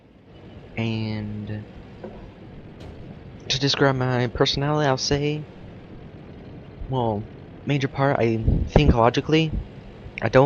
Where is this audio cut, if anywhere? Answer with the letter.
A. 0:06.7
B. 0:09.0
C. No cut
A